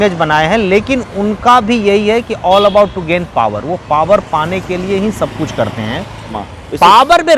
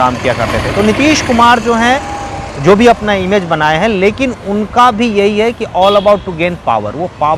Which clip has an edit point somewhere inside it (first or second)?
first